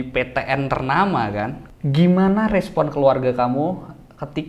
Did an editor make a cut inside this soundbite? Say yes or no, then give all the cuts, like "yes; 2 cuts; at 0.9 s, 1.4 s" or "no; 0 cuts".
yes; 1 cut; at 1.6 s